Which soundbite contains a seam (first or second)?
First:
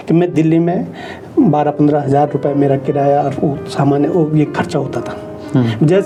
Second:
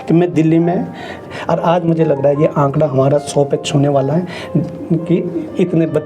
second